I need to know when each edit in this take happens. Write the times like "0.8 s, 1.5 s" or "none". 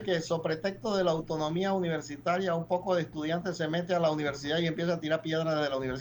none